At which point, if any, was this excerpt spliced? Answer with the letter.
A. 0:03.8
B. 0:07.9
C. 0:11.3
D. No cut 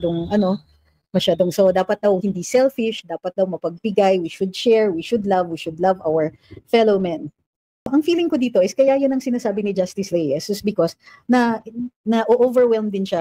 B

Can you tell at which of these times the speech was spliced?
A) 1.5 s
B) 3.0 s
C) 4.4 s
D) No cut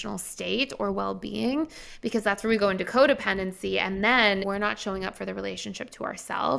C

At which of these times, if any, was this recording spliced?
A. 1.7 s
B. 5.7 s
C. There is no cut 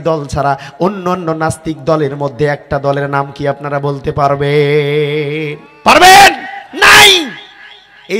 C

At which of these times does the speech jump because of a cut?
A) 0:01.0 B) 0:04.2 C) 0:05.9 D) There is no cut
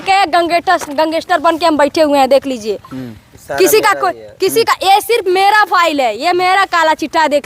D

